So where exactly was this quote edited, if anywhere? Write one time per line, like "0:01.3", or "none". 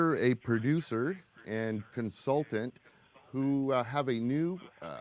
0:02.7